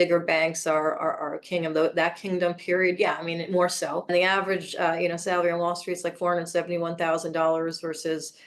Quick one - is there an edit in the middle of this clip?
yes; 1 cut; at 4.1 s

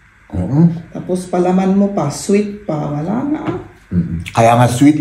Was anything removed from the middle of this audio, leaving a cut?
no; 0 cuts

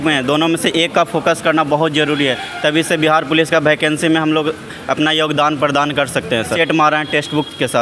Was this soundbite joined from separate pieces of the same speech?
yes; 1 cut; at 6.5 s

